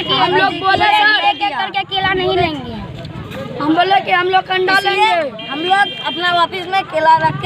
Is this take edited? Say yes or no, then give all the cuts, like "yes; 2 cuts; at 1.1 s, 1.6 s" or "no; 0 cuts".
no; 0 cuts